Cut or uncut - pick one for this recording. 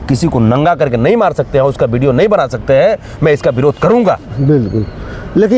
uncut